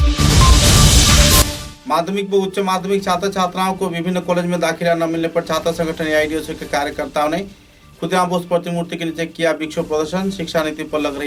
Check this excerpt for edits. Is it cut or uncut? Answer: uncut